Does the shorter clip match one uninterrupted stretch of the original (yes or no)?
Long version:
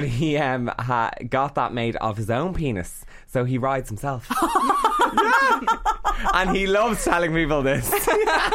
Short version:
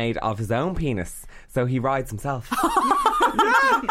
yes